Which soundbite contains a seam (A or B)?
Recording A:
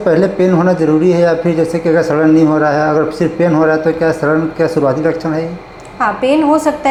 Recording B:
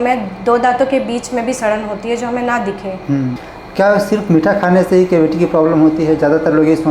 B